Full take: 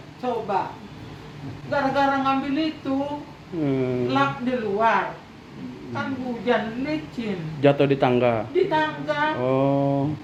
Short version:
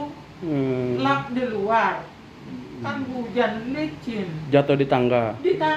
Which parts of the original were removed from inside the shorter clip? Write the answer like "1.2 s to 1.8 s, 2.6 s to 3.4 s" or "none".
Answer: none

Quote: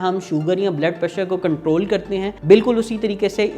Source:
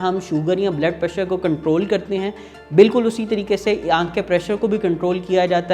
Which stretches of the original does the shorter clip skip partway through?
2.3 s to 2.6 s

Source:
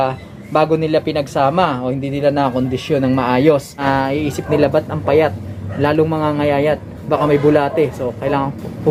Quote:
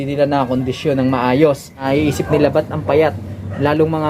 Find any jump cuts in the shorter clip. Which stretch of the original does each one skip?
3.8 s to 4.0 s

